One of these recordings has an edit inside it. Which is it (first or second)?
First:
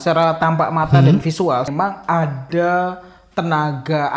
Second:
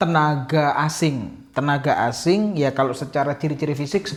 first